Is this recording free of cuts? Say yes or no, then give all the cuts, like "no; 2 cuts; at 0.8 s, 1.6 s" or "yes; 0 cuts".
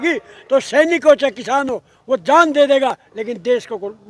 yes; 0 cuts